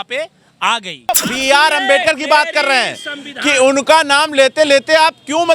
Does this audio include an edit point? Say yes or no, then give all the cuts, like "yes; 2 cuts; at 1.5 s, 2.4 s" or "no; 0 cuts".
yes; 1 cut; at 1.1 s